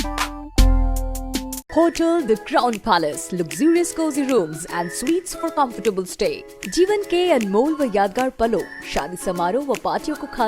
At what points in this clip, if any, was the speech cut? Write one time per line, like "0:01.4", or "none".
0:01.6

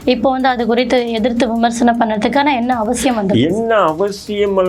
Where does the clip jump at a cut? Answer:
none

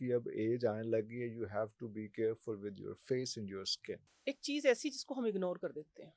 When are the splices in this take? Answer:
0:04.1

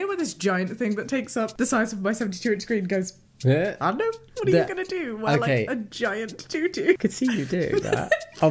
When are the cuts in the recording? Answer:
0:01.5
0:04.2
0:07.0

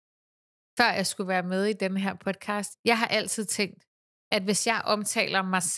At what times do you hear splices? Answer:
0:02.7

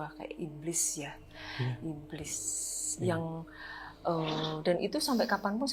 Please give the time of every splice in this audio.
none

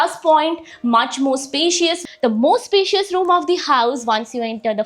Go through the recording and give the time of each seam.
0:02.0

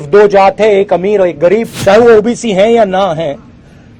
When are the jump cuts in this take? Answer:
0:01.7

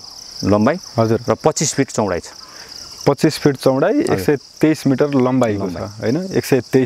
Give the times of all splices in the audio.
none

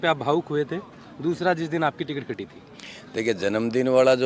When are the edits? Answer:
none

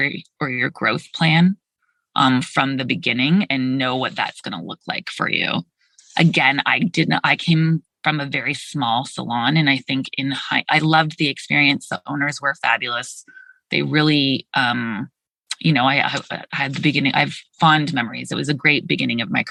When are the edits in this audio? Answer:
none

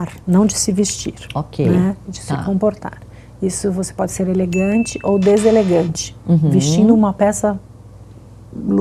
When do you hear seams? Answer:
none

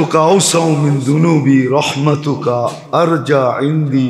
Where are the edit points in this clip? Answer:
none

